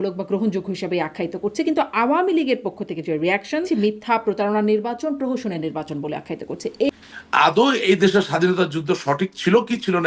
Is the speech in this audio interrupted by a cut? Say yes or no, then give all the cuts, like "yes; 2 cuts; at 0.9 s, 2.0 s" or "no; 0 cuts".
yes; 2 cuts; at 3.6 s, 6.9 s